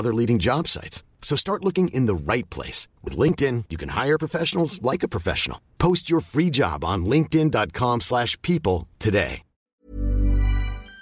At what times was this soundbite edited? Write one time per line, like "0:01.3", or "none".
0:09.8